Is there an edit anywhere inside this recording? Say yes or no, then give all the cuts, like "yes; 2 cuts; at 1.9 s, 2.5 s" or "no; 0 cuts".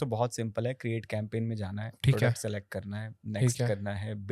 no; 0 cuts